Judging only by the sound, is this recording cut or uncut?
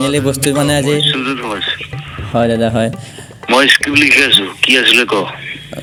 uncut